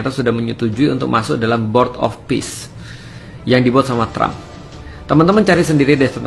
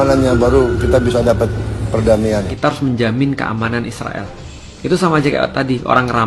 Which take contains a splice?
second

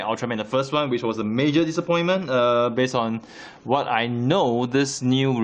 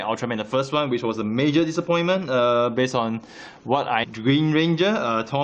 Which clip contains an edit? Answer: first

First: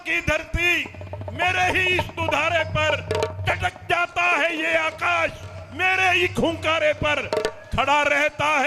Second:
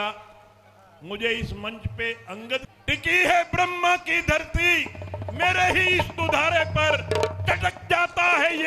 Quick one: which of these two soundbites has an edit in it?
second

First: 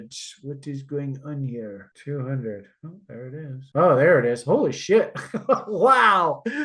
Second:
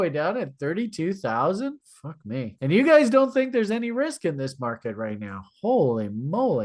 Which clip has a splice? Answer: first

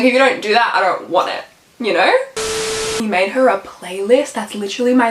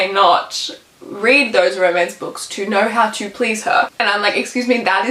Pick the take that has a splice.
first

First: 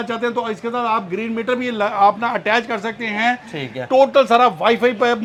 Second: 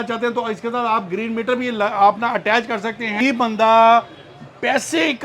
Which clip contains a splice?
second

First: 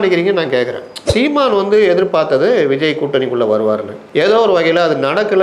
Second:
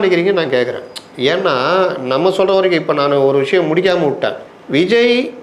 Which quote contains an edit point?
first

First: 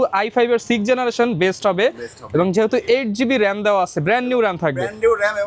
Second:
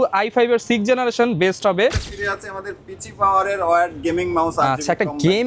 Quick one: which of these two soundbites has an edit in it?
second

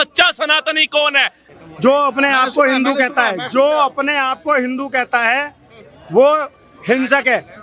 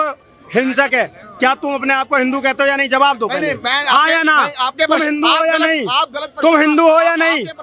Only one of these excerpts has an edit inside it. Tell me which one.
first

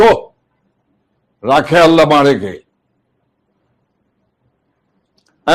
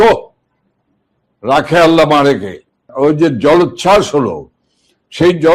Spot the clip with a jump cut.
second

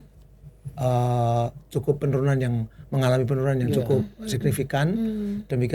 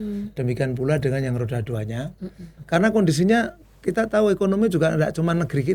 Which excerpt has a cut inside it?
second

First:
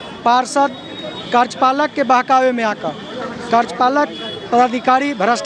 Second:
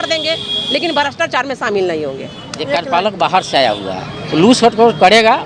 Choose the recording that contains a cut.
second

